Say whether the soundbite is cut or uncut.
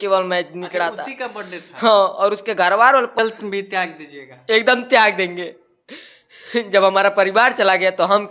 cut